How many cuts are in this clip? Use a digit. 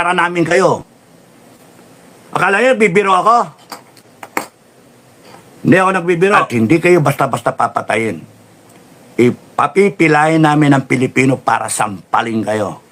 1